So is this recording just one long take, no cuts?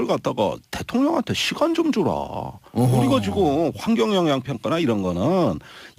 no; 1 cut; at 1.8 s

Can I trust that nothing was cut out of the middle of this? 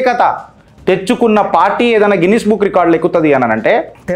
yes; 0 cuts

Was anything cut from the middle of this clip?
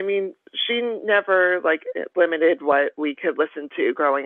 no; 0 cuts

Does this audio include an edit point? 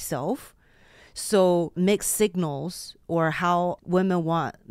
yes; 2 cuts; at 1.7 s, 3.8 s

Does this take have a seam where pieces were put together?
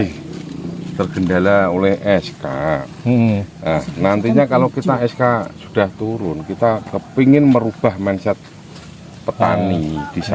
no; 0 cuts

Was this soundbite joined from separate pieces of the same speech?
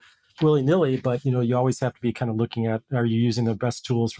no; 0 cuts

